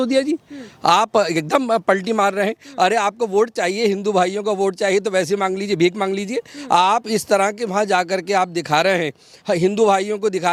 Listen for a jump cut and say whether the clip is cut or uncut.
uncut